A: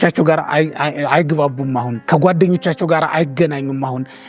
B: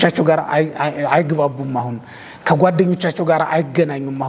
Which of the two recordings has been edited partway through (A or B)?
A